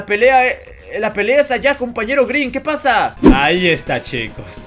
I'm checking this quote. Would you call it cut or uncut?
cut